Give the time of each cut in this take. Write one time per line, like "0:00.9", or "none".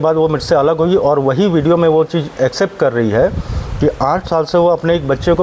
none